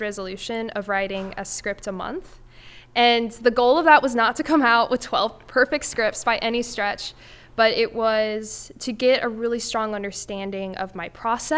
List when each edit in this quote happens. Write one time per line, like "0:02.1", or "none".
none